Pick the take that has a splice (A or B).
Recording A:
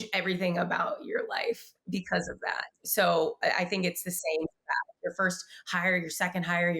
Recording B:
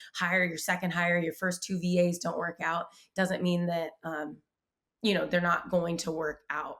A